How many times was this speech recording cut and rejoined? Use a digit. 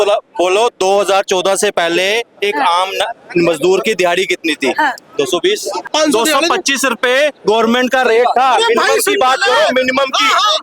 1